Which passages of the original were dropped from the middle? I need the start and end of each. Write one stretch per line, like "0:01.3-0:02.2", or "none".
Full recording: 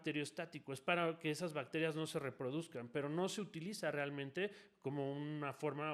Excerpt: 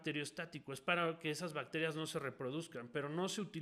none